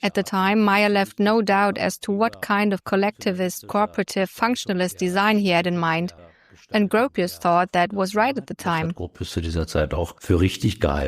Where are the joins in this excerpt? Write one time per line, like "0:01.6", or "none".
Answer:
0:09.0
0:10.2

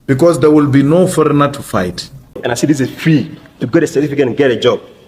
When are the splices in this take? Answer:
0:02.4

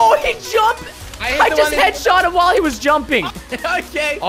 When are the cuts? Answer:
0:03.3

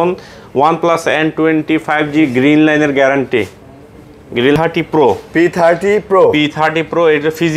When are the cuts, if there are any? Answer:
0:04.6

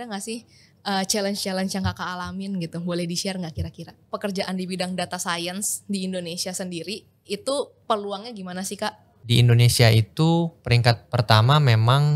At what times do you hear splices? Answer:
0:04.0
0:09.2

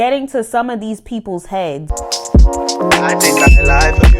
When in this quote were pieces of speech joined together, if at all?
0:01.8

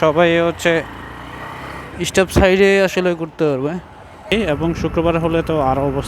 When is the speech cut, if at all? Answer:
0:04.3

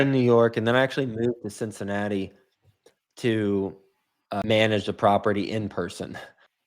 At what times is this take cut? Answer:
0:04.4

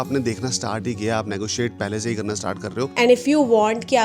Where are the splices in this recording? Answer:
0:02.9

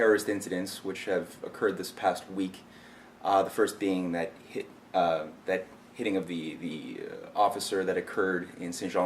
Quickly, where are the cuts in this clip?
0:01.9

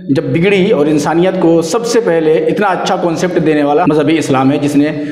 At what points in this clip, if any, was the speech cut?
0:03.8

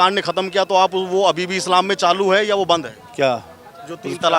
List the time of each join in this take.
none

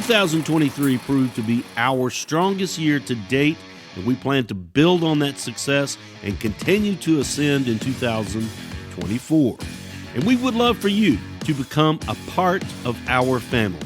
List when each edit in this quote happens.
0:11.3
0:12.7

